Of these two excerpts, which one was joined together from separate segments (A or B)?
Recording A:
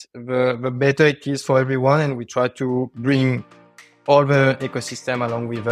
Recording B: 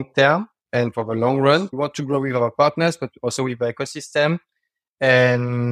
B